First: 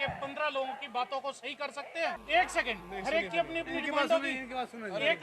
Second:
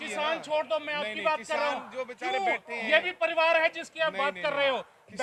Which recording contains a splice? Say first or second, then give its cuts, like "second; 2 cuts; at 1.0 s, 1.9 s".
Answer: first; 1 cut; at 2.2 s